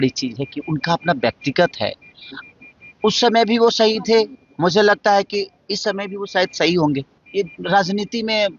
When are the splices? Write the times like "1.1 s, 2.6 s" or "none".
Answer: 7.2 s